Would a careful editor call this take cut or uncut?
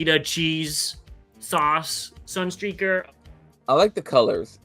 cut